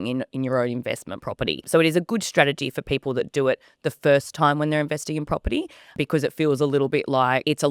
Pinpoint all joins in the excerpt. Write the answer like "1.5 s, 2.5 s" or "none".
1.7 s, 6.0 s

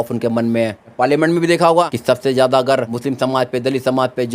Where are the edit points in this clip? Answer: 0.9 s, 1.9 s, 2.9 s

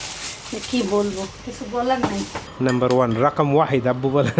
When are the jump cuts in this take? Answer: 2.4 s

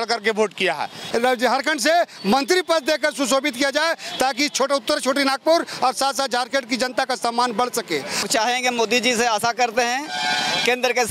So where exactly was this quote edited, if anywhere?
1.0 s, 8.3 s

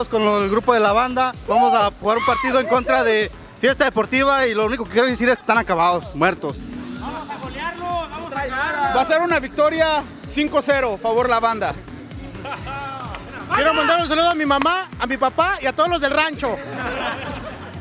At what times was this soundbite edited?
none

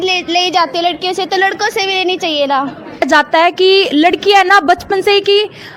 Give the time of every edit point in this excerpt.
3.1 s

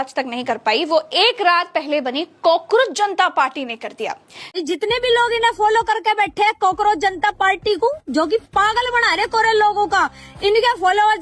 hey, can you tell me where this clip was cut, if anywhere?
4.4 s

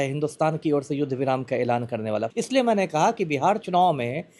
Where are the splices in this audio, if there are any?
2.3 s

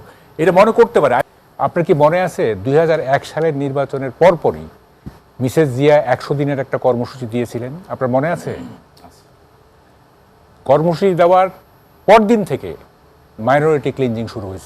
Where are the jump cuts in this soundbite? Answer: 1.2 s

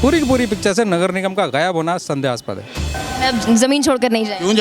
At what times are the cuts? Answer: 2.9 s

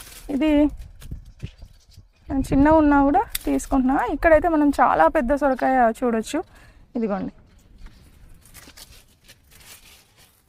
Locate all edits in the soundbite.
none

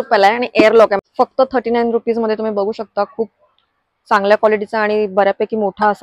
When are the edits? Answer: 1.0 s

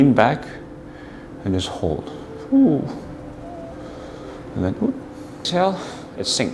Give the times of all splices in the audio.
5.5 s

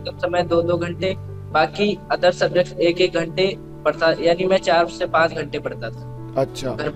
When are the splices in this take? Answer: none

